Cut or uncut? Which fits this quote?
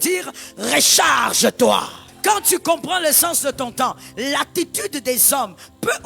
cut